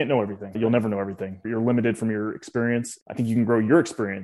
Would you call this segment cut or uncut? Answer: cut